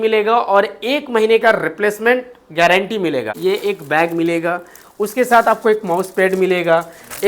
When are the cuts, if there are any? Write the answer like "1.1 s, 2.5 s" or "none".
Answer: 3.4 s